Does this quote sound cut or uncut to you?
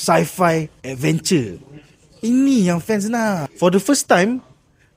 cut